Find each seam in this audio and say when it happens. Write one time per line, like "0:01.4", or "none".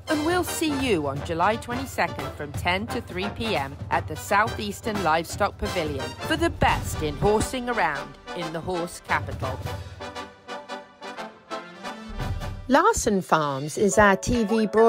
0:12.6